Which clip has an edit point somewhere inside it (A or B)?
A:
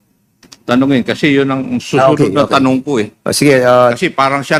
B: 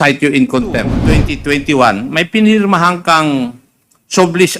B